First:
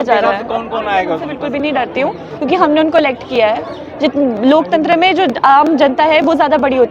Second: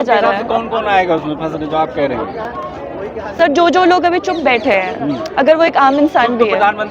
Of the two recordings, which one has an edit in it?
first; 1 cut; at 1.4 s

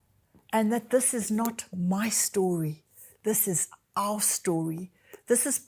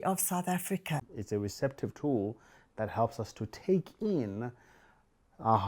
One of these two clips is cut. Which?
second; 1 cut; at 1.1 s

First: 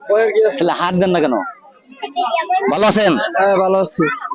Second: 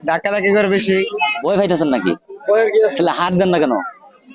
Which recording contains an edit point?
second; 1 cut; at 1.4 s

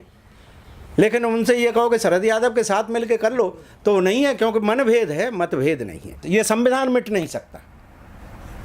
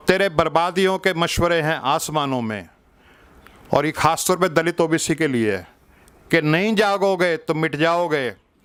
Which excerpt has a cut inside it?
first; 1 cut; at 6.2 s

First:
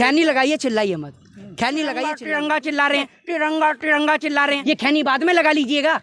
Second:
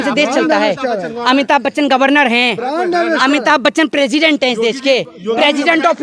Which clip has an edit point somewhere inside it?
first; 2 cuts; at 2.2 s, 4.6 s

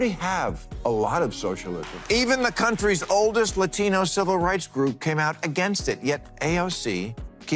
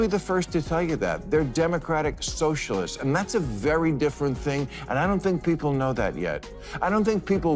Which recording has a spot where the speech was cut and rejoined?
first; 1 cut; at 1.9 s

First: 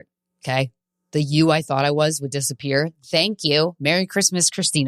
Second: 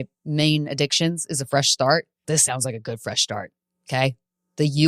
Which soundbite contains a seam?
second; 1 cut; at 2.1 s

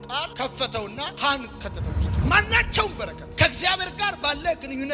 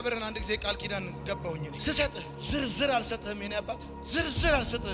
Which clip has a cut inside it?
first; 1 cut; at 2.1 s

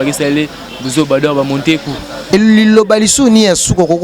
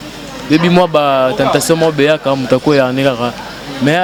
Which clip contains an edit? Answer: first; 1 cut; at 2.3 s

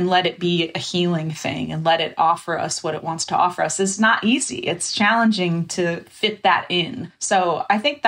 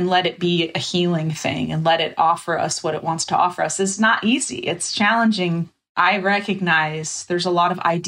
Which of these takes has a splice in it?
second; 1 cut; at 5.7 s

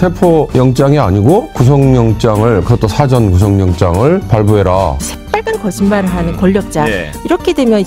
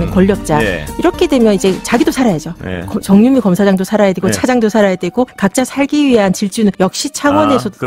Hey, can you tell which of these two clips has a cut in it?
first; 1 cut; at 5.0 s

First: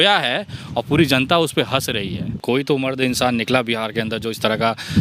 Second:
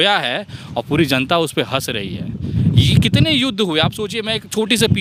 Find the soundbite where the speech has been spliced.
first; 1 cut; at 2.3 s

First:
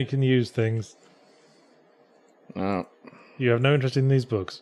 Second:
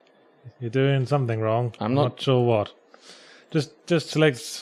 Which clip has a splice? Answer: first; 1 cut; at 1.4 s

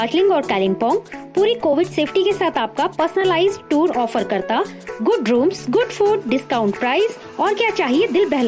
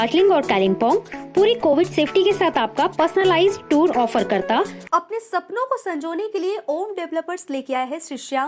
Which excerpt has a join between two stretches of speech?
second; 1 cut; at 4.8 s

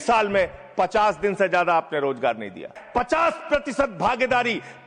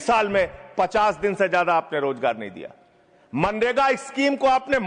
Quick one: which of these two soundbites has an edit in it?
first; 1 cut; at 2.8 s

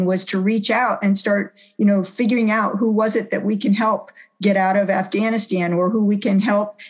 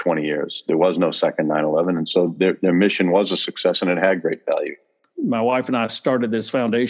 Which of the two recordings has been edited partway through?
second; 1 cut; at 5.0 s

